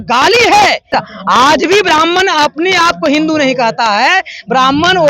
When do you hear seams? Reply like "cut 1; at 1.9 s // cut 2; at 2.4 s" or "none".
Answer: cut 1; at 0.9 s